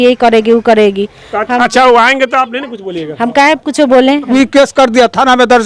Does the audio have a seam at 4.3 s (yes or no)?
yes